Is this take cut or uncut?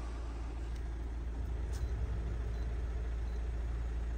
uncut